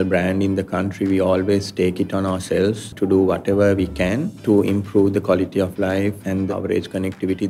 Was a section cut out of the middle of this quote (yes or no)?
yes